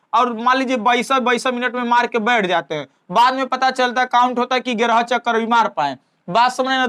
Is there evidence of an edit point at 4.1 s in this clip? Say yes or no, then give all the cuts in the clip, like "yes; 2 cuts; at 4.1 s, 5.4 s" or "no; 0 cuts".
no; 0 cuts